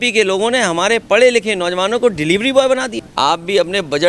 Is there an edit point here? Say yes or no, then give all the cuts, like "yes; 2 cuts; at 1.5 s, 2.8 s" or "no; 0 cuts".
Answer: yes; 1 cut; at 3.0 s